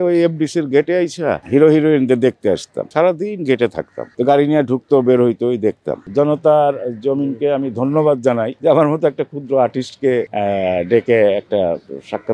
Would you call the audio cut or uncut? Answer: cut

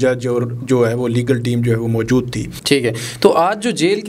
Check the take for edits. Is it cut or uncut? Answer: cut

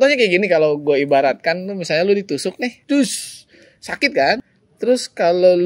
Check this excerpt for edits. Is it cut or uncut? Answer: cut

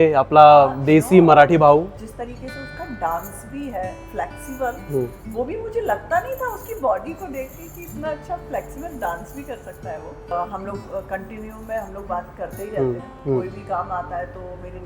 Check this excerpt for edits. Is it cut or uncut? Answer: cut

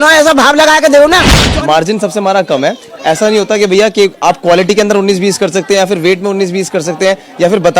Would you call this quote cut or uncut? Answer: cut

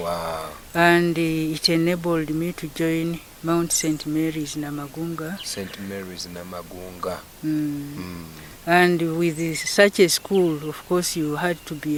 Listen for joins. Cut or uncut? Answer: uncut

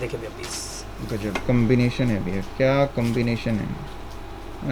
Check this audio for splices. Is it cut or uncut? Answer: cut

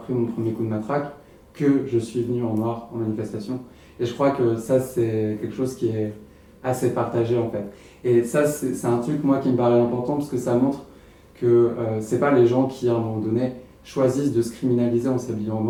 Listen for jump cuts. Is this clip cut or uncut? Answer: uncut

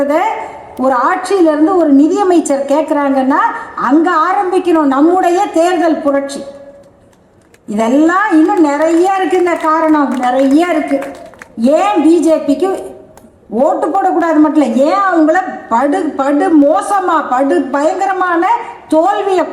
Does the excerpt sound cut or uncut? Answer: uncut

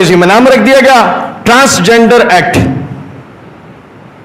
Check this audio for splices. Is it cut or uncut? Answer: uncut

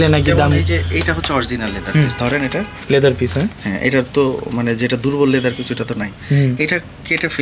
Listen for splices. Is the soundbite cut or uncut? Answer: uncut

